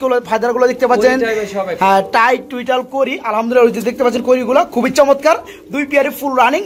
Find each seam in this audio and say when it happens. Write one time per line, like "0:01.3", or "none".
none